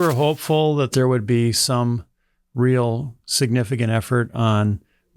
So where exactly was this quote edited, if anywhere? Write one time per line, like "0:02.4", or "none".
0:00.9